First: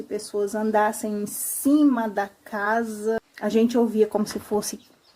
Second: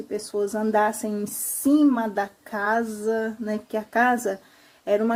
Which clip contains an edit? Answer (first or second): first